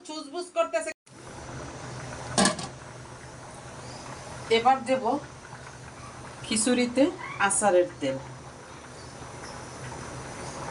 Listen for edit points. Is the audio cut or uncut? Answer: cut